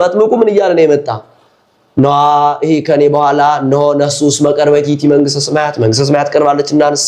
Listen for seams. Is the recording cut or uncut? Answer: uncut